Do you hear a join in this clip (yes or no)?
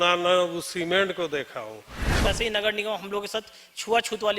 yes